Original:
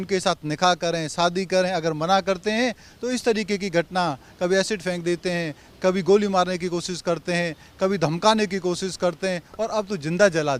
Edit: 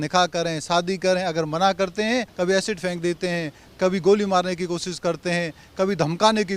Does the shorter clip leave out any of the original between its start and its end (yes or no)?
yes